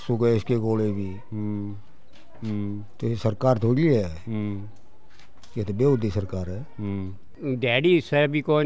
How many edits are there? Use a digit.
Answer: 1